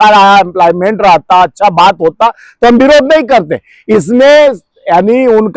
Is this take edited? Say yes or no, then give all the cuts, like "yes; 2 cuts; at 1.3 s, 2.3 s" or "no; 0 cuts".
no; 0 cuts